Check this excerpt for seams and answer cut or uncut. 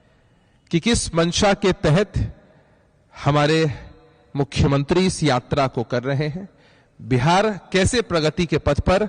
uncut